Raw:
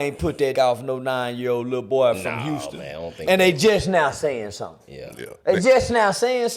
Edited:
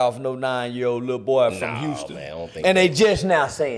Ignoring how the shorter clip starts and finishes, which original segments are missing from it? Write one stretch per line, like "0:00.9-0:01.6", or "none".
none